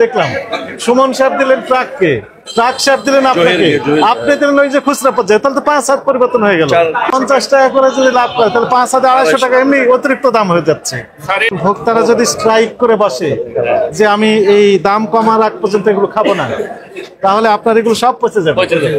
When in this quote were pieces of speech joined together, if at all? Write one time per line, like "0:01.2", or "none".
0:07.1
0:11.5